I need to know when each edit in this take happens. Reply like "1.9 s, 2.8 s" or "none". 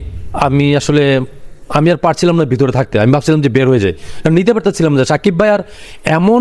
none